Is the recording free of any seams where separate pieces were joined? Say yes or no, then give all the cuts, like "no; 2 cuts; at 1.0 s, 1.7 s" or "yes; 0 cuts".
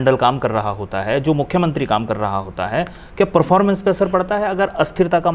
yes; 0 cuts